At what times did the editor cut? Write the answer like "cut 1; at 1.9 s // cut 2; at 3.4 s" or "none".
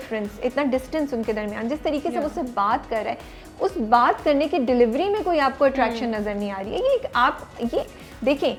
none